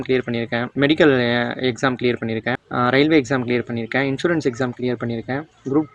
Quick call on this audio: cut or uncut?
uncut